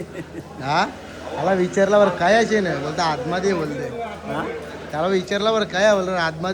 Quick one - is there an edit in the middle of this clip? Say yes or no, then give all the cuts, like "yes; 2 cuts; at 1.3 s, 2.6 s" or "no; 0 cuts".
no; 0 cuts